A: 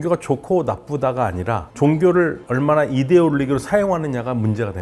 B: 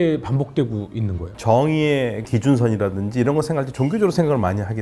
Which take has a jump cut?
B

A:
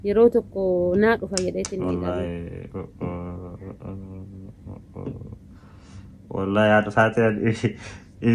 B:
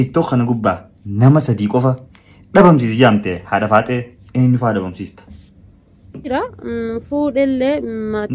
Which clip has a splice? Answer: B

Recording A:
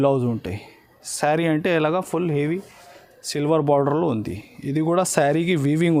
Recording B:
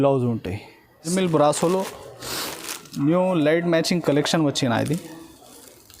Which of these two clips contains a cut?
B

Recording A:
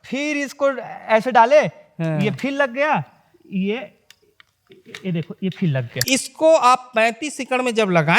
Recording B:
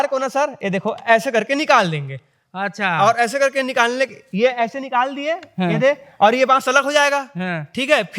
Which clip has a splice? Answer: A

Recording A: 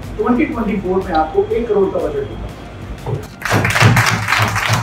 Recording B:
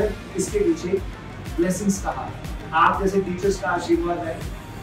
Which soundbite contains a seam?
B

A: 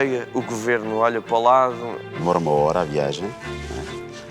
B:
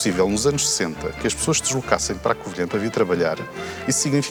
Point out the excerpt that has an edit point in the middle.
A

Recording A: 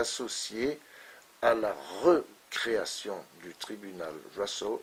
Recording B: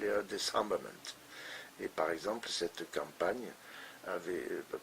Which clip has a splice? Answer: B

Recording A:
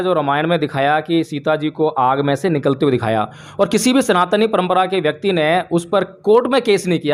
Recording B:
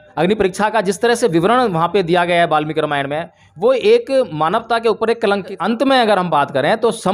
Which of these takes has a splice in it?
B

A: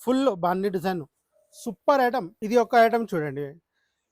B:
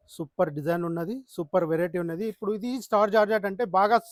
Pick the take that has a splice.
A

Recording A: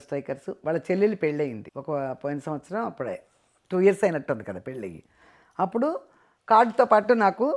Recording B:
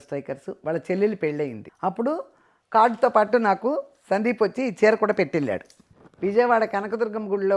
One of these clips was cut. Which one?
B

